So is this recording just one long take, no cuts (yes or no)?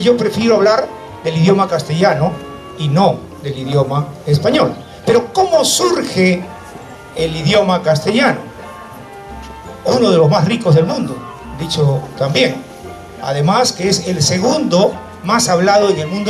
yes